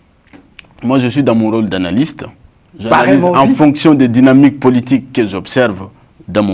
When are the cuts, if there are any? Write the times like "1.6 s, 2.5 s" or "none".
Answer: none